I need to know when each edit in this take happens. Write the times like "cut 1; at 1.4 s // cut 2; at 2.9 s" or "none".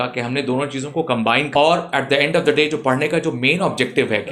cut 1; at 1.5 s